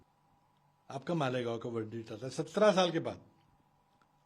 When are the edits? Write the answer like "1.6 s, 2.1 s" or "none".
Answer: none